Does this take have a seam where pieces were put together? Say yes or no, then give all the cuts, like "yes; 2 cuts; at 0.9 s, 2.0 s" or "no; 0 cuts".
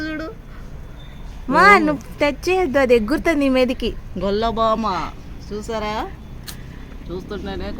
no; 0 cuts